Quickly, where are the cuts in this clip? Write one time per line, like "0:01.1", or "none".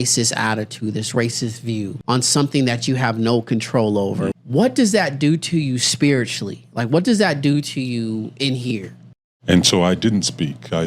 0:02.0
0:04.4
0:09.1